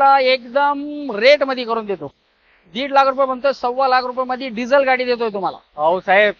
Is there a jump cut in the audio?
no; 0 cuts

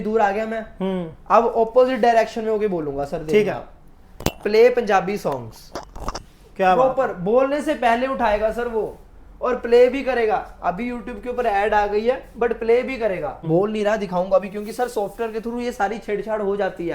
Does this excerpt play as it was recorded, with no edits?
no; 1 cut; at 13.4 s

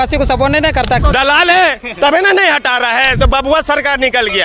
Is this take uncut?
no; 2 cuts; at 1.0 s, 3.2 s

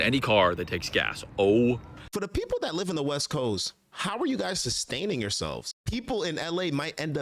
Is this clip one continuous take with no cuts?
no; 2 cuts; at 2.0 s, 5.8 s

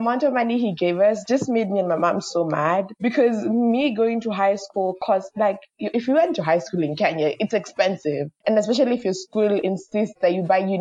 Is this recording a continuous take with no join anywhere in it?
yes; 0 cuts

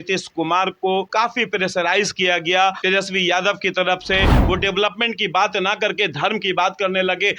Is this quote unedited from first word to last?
no; 3 cuts; at 1.1 s, 2.8 s, 4.4 s

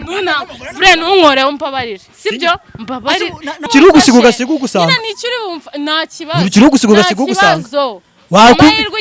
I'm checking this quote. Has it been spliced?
yes; 1 cut; at 3.7 s

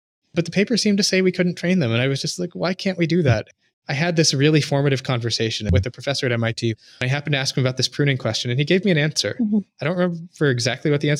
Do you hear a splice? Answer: yes; 3 cuts; at 3.5 s, 5.7 s, 6.7 s

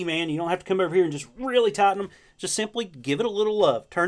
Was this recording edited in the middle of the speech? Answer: no; 0 cuts

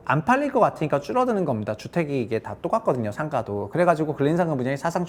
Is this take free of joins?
yes; 0 cuts

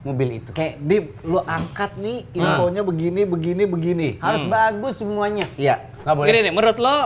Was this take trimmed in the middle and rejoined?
yes; 1 cut; at 5.9 s

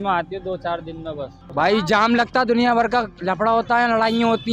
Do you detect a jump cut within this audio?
yes; 1 cut; at 1.4 s

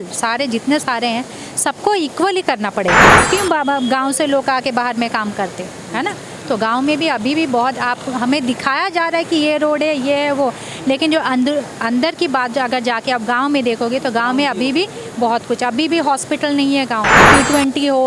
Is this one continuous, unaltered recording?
no; 2 cuts; at 3.1 s, 17.3 s

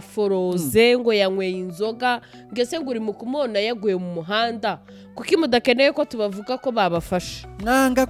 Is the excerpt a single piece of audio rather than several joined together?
yes; 0 cuts

